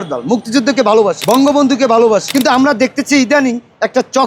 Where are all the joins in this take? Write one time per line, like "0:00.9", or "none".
0:01.2
0:02.3